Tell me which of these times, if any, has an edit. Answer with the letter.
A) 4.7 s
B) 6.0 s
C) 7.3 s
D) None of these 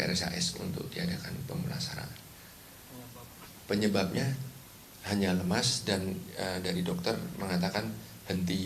B